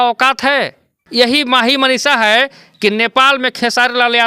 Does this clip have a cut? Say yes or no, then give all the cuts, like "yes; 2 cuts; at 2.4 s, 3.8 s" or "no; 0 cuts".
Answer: yes; 1 cut; at 1.0 s